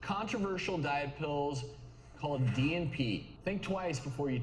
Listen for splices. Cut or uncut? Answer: cut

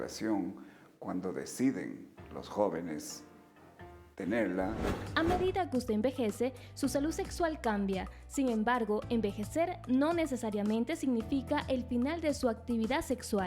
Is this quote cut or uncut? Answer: cut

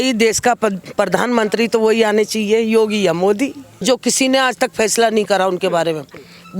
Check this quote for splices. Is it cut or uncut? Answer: cut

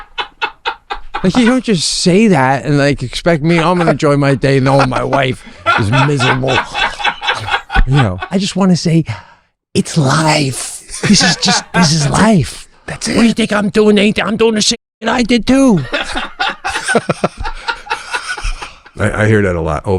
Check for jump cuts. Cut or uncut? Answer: cut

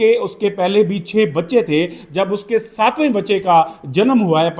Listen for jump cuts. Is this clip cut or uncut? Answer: uncut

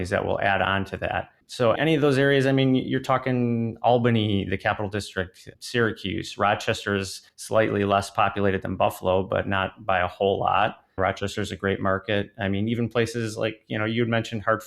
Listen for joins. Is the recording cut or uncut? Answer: cut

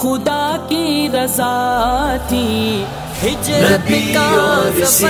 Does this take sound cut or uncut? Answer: uncut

